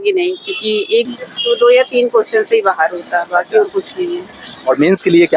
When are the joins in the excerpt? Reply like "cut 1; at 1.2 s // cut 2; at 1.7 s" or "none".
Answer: cut 1; at 1.1 s